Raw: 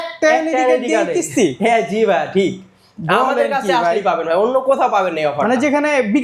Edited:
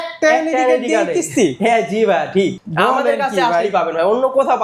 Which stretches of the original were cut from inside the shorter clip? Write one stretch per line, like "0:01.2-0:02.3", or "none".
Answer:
0:02.6-0:02.9